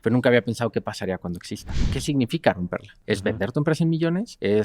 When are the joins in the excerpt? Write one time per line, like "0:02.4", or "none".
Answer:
0:01.7